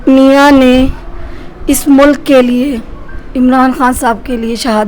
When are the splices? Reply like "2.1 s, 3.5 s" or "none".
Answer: none